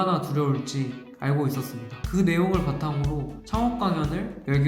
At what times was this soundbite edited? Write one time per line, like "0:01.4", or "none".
0:01.9